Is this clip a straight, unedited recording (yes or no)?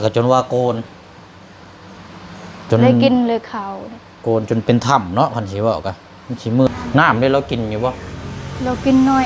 no